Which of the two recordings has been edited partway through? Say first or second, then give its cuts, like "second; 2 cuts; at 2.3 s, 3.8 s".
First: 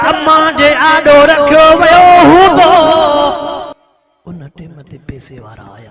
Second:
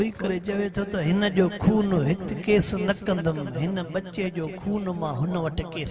first; 1 cut; at 3.7 s